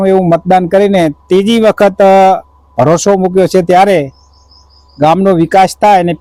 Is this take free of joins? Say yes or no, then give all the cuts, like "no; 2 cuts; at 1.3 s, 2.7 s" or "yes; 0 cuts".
yes; 0 cuts